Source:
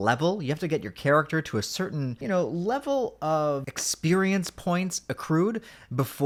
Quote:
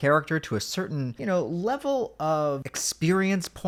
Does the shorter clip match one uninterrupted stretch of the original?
yes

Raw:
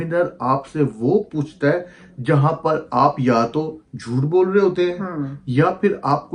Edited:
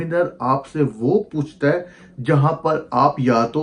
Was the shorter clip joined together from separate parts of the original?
no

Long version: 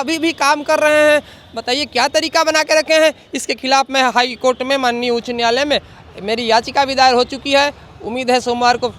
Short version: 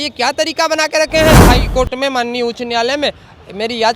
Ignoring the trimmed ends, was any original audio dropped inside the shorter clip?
yes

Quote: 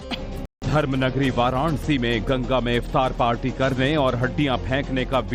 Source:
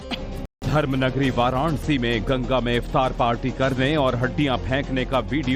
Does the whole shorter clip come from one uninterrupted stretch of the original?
yes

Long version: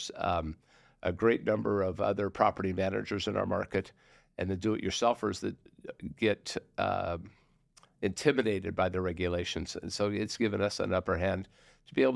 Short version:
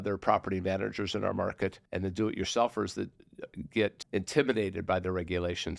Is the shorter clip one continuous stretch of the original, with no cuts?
no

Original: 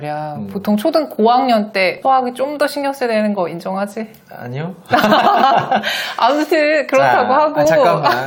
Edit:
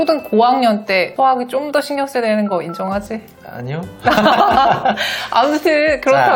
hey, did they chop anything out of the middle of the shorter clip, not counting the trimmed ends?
no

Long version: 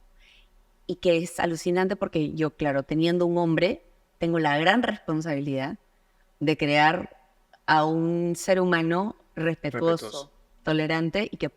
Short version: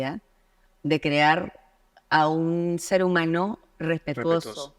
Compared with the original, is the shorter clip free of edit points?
yes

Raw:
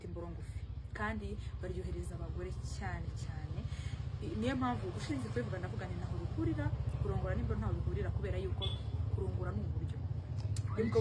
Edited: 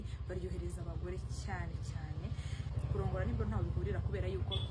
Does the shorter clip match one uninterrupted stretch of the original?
no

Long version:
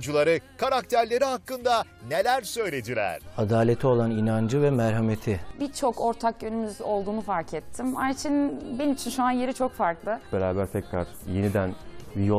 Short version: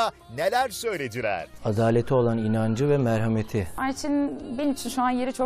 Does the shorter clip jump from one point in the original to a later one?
yes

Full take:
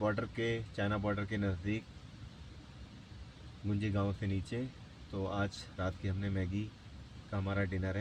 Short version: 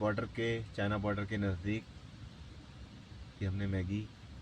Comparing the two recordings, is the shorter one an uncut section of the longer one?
no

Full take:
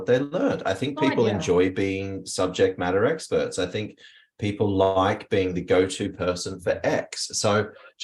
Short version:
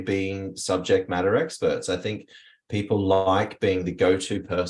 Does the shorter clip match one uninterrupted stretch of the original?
yes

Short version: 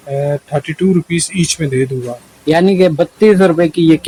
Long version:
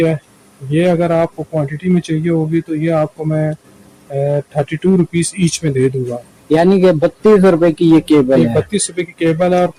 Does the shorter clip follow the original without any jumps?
yes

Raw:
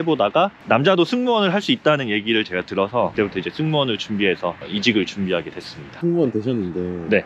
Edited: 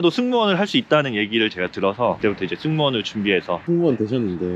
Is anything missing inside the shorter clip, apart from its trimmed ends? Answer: yes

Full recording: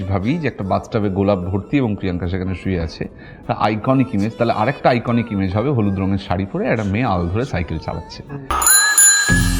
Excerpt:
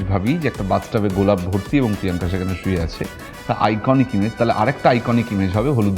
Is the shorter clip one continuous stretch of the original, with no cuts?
yes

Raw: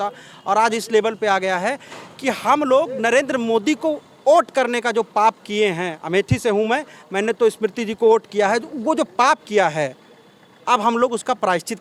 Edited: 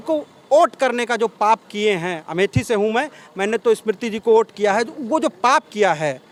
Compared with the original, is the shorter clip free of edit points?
yes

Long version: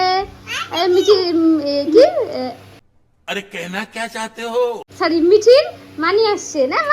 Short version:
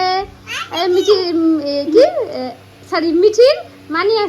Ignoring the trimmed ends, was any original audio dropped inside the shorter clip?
yes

